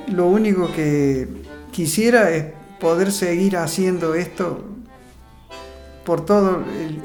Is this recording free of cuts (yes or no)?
yes